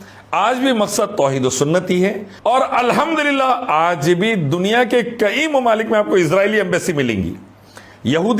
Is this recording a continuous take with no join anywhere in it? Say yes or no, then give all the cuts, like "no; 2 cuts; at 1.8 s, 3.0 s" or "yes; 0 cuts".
no; 1 cut; at 2.3 s